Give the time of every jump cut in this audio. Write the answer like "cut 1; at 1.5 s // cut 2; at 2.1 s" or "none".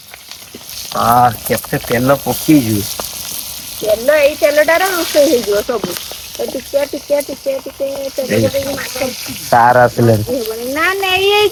none